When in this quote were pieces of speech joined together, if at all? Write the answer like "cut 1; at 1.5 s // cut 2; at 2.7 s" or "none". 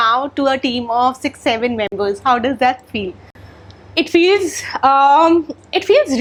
none